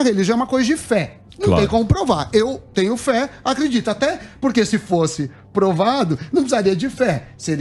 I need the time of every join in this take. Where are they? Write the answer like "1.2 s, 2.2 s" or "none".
none